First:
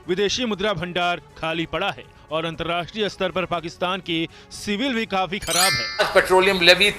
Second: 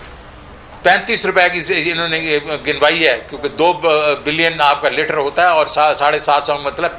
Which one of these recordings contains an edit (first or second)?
first